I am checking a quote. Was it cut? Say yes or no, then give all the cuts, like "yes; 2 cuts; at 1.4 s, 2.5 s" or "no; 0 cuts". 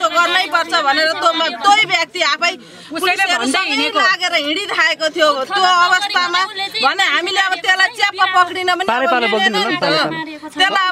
no; 0 cuts